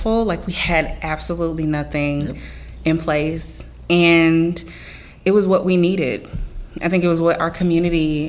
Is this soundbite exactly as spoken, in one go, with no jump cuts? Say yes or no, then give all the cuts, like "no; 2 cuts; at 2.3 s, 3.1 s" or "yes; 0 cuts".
yes; 0 cuts